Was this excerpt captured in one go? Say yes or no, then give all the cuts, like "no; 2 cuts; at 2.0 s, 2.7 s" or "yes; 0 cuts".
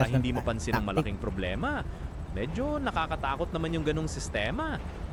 yes; 0 cuts